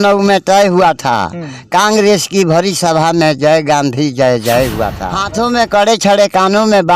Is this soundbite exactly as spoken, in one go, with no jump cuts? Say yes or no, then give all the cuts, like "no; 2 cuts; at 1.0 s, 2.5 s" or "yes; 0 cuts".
no; 1 cut; at 5.1 s